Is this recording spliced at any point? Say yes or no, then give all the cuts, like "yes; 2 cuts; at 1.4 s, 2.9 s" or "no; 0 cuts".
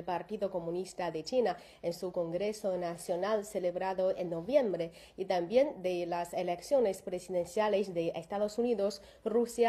no; 0 cuts